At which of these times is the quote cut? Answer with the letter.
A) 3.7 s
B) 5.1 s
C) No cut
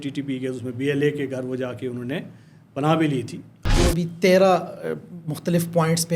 A